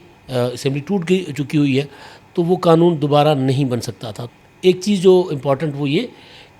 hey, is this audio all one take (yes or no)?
yes